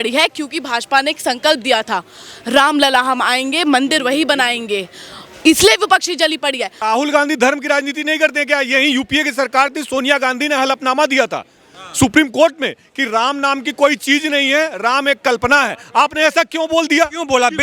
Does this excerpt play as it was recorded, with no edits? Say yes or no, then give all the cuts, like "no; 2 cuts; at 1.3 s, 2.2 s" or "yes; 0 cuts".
no; 1 cut; at 6.7 s